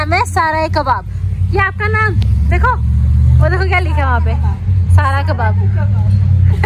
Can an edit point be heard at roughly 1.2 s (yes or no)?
no